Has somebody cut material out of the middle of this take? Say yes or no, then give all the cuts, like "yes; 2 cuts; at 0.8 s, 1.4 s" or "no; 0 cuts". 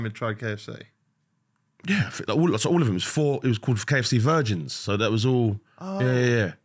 no; 0 cuts